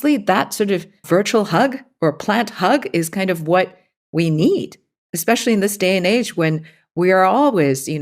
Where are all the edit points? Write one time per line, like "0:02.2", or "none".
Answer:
0:01.0